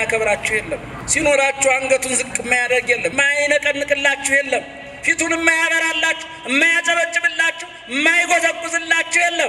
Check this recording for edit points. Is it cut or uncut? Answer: cut